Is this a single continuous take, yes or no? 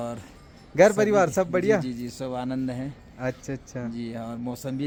yes